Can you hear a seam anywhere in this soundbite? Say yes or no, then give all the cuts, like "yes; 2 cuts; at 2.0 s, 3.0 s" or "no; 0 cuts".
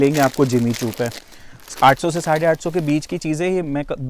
no; 0 cuts